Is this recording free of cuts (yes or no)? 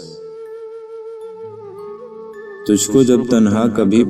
yes